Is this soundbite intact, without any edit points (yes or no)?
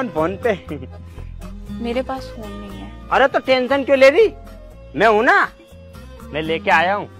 yes